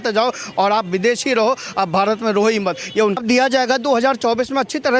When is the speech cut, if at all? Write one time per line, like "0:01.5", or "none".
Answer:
0:03.2